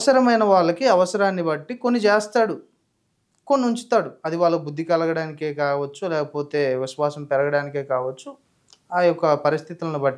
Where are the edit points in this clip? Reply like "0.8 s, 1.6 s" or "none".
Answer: none